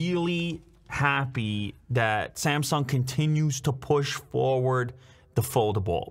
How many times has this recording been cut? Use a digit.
0